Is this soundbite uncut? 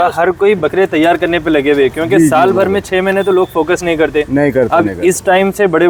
yes; 0 cuts

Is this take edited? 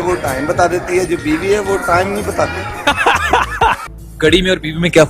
yes; 1 cut; at 3.8 s

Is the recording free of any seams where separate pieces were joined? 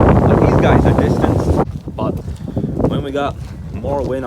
no; 1 cut; at 1.6 s

